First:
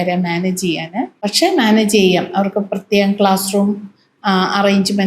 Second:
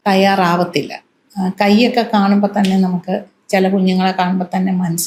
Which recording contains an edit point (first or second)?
first